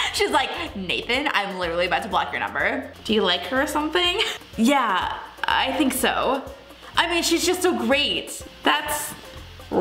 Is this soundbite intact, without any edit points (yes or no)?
no